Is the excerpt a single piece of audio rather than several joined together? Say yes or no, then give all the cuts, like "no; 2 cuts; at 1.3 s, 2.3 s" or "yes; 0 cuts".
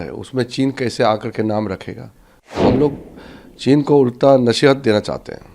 no; 1 cut; at 2.6 s